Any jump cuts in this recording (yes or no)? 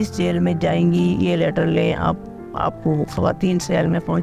no